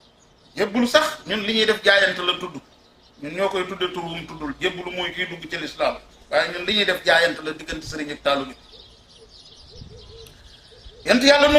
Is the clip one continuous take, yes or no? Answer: no